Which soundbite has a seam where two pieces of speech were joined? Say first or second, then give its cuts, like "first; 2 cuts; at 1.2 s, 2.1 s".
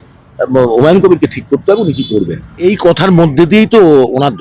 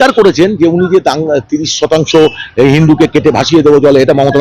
first; 1 cut; at 2.6 s